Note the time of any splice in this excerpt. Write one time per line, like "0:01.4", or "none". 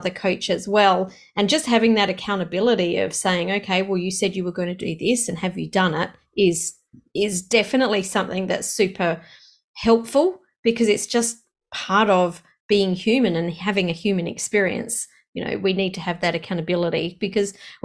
none